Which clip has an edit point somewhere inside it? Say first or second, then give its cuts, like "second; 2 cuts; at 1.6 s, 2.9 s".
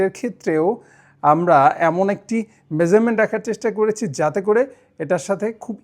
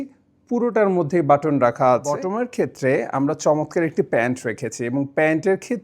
second; 1 cut; at 2.3 s